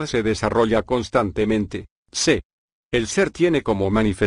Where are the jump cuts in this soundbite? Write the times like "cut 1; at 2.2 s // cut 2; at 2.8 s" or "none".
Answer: cut 1; at 2.3 s